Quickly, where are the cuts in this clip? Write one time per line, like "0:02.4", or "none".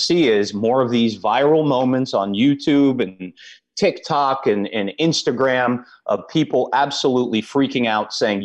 none